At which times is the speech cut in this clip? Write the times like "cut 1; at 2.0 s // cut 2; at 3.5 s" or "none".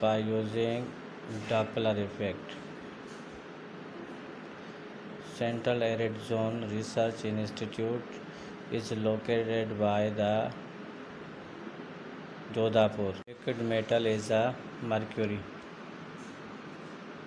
cut 1; at 13.3 s